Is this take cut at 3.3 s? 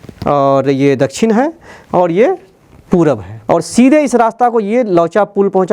yes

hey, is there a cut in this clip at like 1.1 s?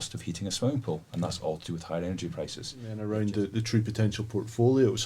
no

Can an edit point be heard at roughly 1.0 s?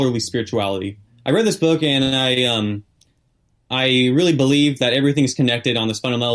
yes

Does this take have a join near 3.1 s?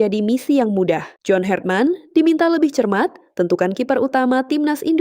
no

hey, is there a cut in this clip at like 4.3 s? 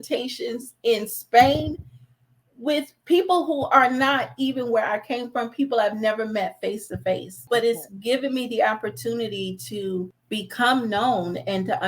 no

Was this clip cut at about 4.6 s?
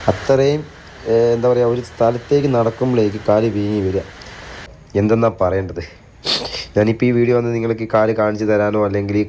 yes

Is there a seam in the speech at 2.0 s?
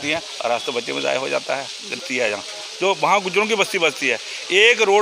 yes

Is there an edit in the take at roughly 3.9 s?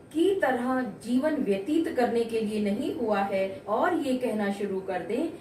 yes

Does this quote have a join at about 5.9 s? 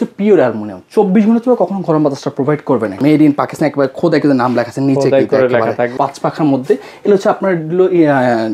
yes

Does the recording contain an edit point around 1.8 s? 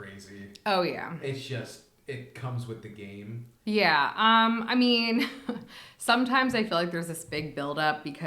no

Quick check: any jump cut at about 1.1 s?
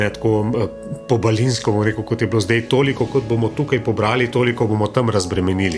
no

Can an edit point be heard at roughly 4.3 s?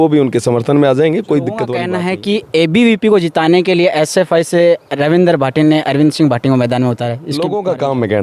no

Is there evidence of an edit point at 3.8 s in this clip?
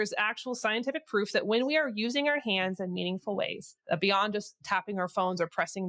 no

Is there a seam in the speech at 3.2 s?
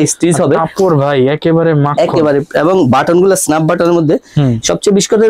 no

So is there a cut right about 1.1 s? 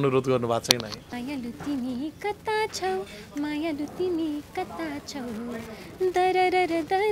yes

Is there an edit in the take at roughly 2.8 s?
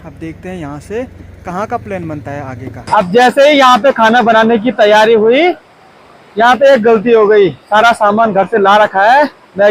yes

